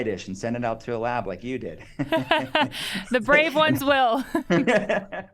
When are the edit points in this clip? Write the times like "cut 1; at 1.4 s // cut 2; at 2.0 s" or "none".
cut 1; at 4.4 s

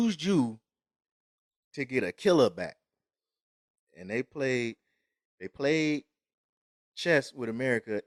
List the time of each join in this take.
none

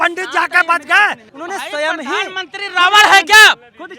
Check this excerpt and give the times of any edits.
cut 1; at 1.3 s

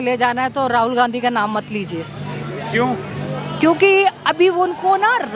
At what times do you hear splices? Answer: none

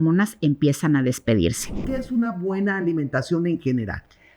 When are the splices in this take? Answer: cut 1; at 1.8 s

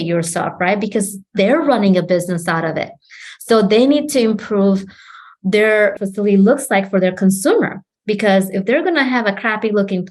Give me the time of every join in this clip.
cut 1; at 5.9 s

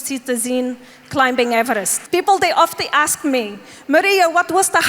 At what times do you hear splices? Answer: cut 1; at 2.0 s

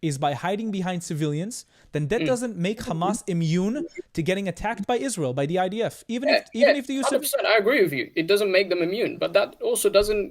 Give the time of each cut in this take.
none

